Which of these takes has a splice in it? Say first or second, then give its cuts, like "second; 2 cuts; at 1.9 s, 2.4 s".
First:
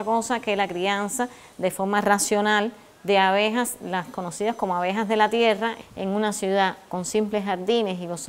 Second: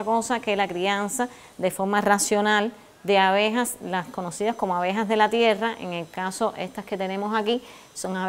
first; 1 cut; at 5.8 s